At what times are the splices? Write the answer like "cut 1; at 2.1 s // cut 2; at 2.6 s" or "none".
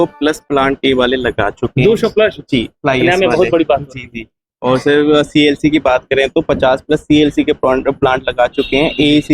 none